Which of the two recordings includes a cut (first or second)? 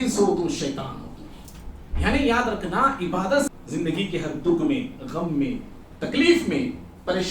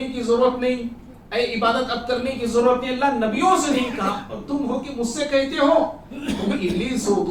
first